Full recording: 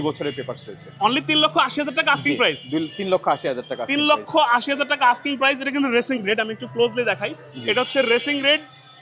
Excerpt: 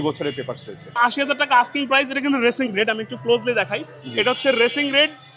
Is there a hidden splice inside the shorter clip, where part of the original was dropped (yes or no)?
yes